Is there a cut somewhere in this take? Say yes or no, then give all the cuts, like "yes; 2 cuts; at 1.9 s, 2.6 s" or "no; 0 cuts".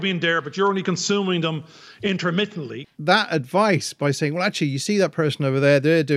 yes; 1 cut; at 2.7 s